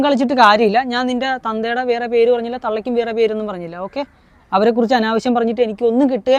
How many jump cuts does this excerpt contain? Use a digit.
0